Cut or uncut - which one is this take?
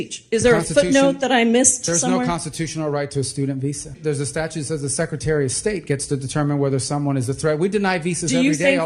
cut